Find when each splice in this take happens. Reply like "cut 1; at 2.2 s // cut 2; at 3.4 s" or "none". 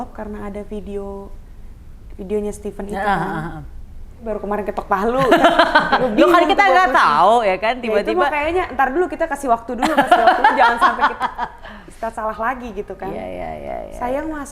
cut 1; at 4.2 s